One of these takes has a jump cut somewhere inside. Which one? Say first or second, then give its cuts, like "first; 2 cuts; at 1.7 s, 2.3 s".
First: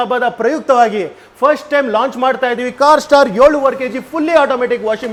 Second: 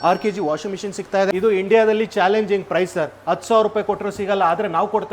second; 1 cut; at 1.3 s